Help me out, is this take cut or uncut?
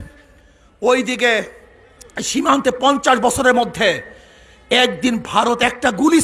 uncut